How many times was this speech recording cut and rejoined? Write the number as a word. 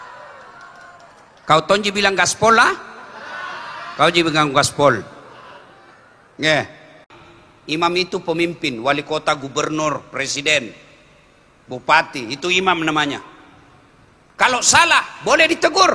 one